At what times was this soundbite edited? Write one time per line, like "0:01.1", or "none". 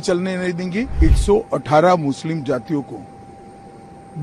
0:00.9